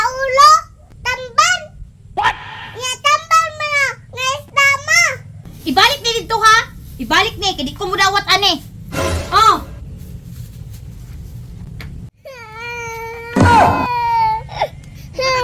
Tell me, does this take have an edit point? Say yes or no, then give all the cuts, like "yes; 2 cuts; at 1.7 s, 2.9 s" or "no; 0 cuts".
yes; 1 cut; at 5.5 s